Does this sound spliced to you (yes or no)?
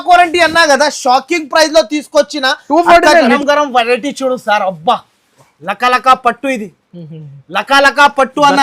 yes